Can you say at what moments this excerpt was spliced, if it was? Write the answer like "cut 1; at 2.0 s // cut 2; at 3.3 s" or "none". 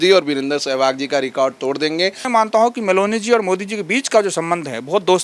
cut 1; at 2.2 s